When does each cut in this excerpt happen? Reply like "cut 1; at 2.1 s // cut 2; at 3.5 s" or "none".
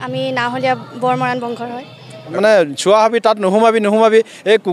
cut 1; at 2.3 s

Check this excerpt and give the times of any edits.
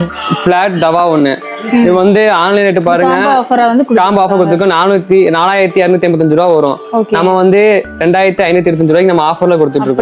none

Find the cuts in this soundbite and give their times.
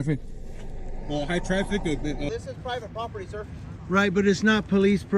cut 1; at 2.3 s

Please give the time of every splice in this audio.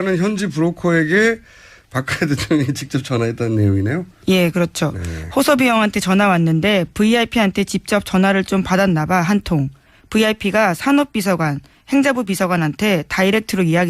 cut 1; at 3.2 s

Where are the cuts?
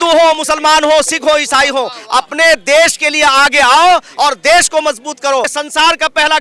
cut 1; at 5.5 s

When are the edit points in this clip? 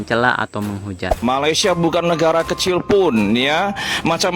cut 1; at 1.2 s

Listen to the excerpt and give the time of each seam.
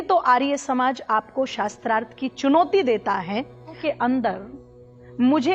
cut 1; at 3.8 s

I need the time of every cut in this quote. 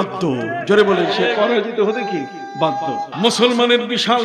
cut 1; at 3.1 s

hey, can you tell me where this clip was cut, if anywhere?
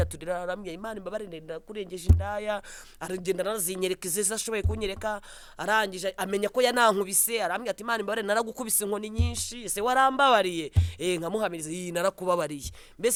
none

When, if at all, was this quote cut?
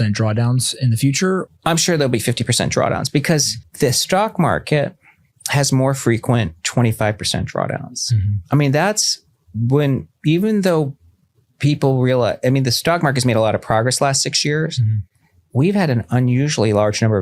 cut 1; at 1.4 s // cut 2; at 3.6 s

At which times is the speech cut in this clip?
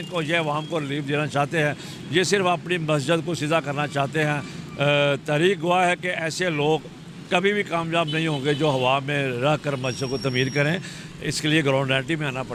none

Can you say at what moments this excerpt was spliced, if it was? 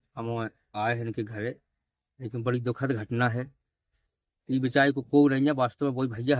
none

